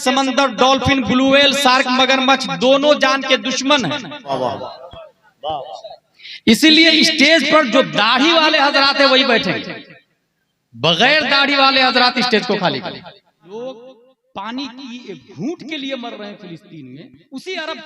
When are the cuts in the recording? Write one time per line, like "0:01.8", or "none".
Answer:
0:04.3
0:13.4